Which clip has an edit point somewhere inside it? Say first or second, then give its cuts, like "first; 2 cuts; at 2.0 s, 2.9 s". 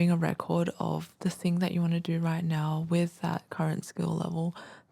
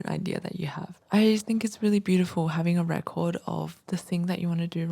second; 1 cut; at 0.9 s